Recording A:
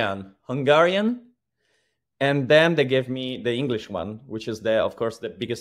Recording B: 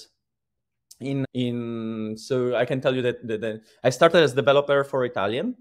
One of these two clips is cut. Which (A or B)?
B